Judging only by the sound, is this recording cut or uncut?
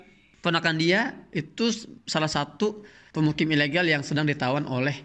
uncut